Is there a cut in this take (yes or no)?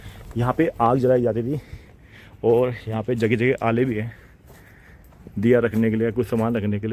no